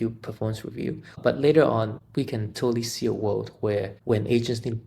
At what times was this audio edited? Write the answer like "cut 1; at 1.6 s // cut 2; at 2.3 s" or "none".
cut 1; at 1.2 s // cut 2; at 2.0 s // cut 3; at 3.9 s